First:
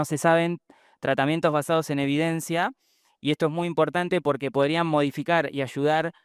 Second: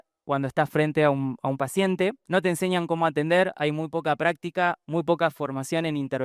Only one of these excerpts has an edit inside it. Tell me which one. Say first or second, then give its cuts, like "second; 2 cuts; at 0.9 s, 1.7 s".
second; 1 cut; at 2.2 s